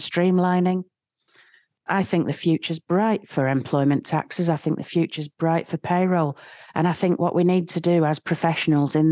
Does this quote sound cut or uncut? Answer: cut